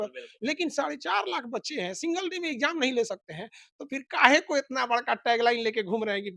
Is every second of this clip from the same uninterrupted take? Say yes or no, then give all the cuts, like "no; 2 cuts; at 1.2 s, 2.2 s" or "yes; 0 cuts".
yes; 0 cuts